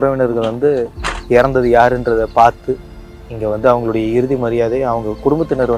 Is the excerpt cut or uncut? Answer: uncut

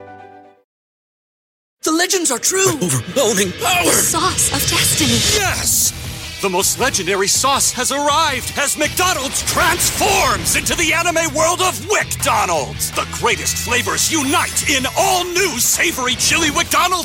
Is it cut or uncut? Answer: uncut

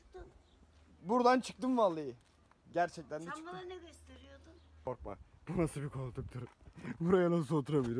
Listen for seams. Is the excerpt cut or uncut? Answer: cut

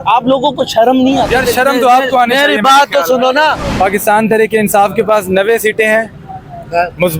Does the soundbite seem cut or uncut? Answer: cut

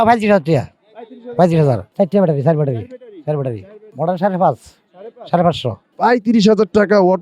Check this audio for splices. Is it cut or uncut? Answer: cut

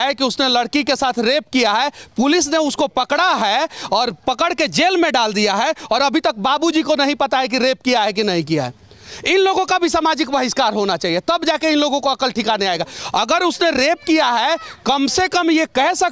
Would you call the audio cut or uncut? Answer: uncut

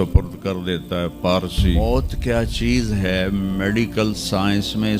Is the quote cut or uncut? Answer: cut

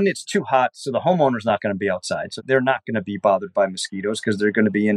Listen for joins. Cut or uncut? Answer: uncut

